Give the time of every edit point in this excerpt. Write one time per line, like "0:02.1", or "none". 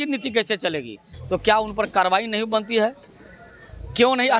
0:01.1